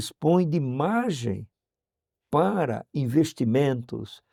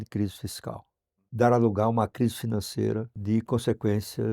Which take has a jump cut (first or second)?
second